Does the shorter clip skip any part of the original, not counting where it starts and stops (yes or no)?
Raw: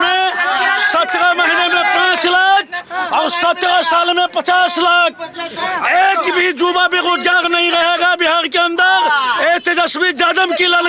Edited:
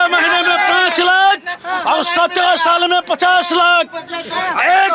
no